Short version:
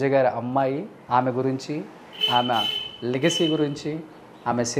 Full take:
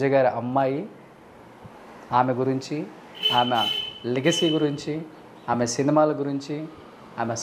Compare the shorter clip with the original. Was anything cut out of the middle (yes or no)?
yes